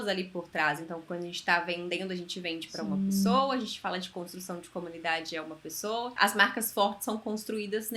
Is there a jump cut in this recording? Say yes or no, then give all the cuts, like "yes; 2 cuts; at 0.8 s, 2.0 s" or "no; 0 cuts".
yes; 1 cut; at 6.1 s